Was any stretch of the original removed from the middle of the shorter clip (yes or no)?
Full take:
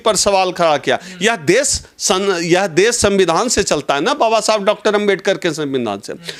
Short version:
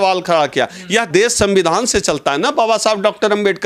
yes